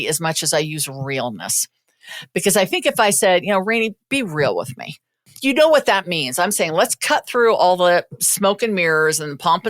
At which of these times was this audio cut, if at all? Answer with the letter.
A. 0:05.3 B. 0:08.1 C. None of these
B